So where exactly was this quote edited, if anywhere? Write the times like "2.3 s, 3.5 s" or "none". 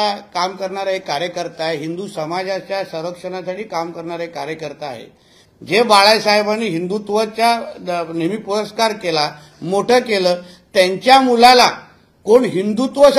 5.4 s